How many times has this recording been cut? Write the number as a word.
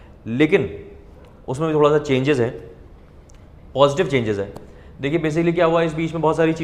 zero